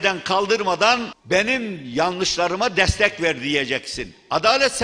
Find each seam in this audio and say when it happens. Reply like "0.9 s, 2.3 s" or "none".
none